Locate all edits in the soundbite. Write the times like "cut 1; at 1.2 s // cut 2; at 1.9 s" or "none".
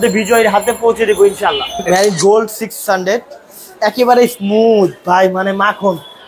cut 1; at 1.8 s